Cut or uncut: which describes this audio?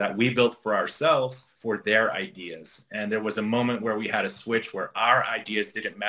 cut